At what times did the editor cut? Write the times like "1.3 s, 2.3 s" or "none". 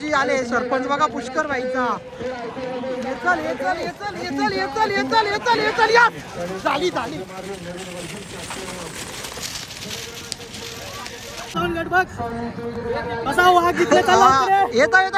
none